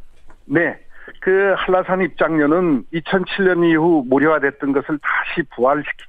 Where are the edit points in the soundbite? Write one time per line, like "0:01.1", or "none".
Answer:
0:02.0